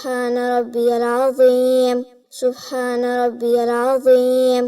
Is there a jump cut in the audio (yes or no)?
yes